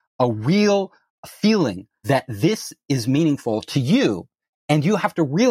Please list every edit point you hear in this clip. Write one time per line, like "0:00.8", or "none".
0:01.2
0:02.0